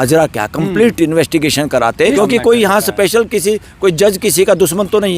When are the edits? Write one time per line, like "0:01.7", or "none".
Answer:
0:02.2